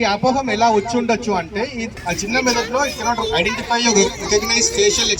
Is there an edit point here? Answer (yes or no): yes